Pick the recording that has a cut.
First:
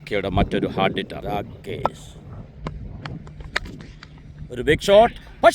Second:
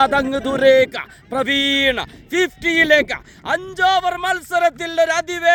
first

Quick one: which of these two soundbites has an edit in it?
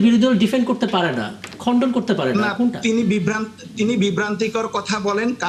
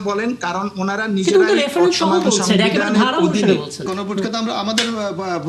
second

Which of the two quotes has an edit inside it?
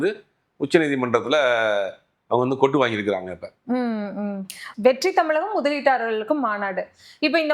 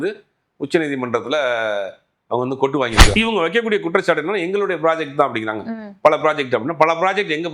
second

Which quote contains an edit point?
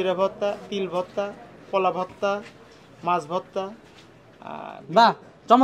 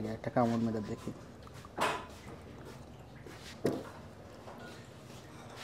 second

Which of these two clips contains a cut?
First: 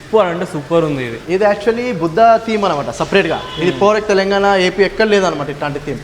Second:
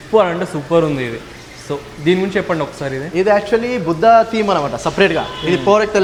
first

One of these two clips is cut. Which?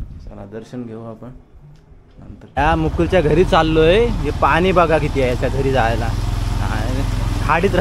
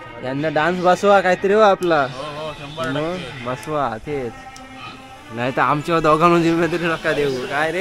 first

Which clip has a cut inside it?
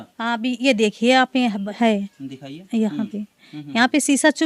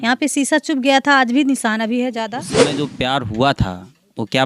second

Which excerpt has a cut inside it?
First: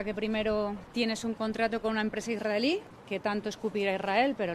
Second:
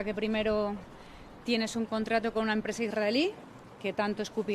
first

